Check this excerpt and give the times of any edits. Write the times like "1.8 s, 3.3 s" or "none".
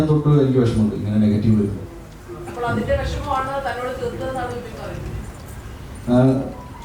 none